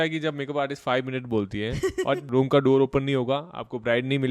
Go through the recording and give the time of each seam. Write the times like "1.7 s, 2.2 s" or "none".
2.2 s